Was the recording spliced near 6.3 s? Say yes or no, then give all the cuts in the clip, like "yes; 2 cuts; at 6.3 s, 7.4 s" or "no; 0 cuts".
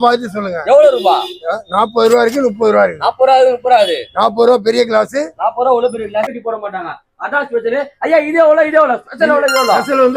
yes; 1 cut; at 6.3 s